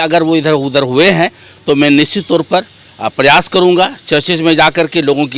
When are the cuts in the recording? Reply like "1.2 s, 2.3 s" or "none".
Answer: none